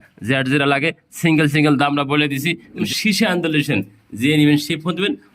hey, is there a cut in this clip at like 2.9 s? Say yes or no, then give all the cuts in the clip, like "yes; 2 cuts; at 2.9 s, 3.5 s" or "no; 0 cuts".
yes; 1 cut; at 2.9 s